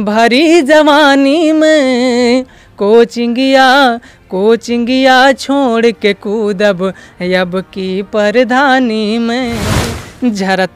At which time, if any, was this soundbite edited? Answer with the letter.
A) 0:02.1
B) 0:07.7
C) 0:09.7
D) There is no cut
C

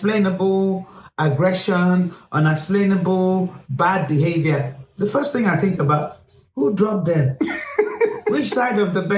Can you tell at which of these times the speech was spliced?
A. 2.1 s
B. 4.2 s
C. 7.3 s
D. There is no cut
D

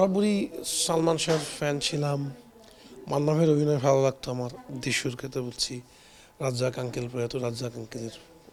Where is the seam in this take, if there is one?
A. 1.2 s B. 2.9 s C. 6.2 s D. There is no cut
D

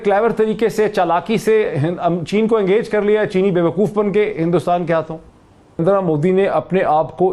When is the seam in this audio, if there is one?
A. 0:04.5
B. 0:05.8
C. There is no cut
B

